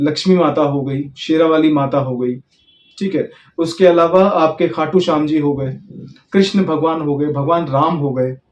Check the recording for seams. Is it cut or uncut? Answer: uncut